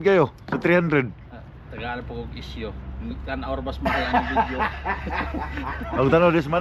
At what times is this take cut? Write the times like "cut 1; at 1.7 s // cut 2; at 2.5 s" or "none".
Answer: none